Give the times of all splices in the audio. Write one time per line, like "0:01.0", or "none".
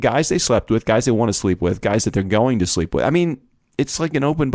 none